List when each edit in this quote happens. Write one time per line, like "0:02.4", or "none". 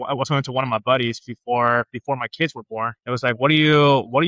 0:03.0